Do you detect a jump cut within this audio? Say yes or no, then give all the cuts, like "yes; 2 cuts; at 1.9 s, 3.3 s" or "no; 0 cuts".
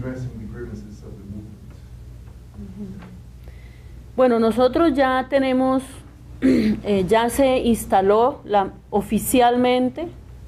no; 0 cuts